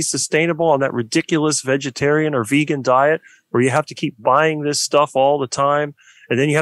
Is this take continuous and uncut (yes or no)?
yes